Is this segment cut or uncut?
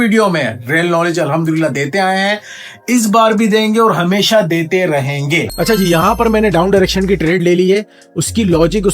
cut